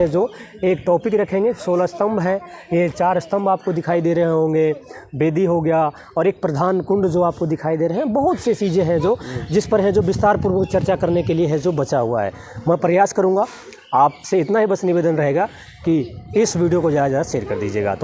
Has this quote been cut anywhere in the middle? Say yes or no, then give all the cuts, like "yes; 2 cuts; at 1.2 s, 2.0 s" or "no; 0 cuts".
no; 0 cuts